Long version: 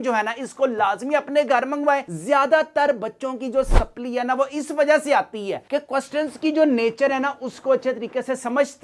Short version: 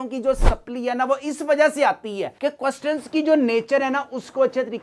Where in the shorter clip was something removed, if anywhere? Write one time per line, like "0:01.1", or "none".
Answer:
none